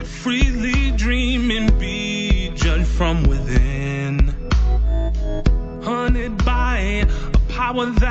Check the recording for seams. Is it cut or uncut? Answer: uncut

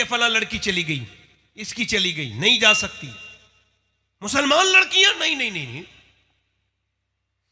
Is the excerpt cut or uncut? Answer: uncut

